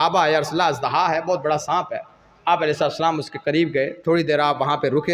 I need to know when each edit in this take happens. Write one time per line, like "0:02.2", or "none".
none

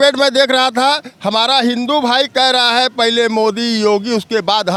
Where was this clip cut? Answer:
none

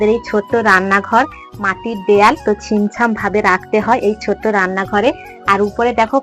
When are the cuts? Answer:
none

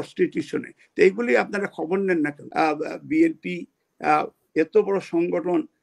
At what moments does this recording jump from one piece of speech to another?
0:02.4

